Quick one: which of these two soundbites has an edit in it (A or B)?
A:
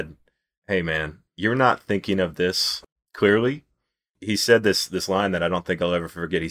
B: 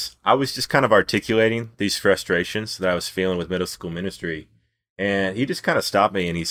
A